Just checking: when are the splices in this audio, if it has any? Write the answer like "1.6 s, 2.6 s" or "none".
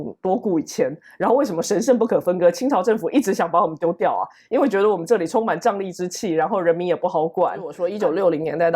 7.8 s

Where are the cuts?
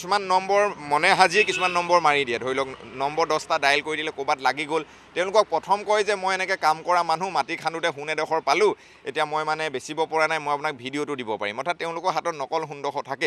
none

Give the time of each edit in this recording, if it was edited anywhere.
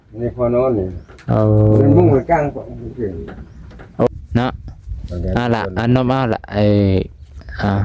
4.1 s

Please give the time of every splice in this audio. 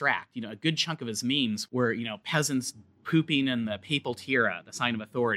1.6 s

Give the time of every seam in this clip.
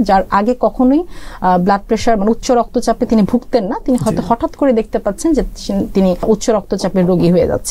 6.2 s

